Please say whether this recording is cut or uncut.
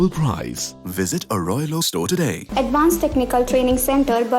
cut